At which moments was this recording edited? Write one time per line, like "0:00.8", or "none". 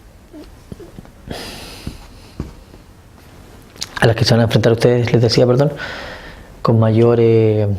0:01.3